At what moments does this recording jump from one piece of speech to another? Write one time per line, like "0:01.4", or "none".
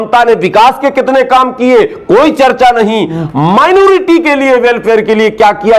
none